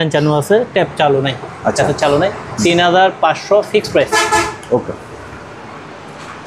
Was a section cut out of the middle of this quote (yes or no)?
no